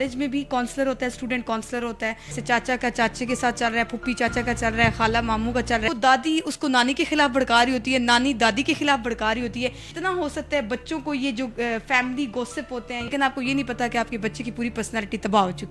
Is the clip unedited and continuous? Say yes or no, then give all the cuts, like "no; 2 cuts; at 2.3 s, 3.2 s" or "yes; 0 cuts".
no; 4 cuts; at 2.4 s, 5.9 s, 9.9 s, 13.1 s